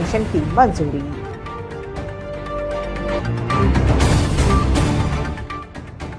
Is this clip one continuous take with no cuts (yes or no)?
yes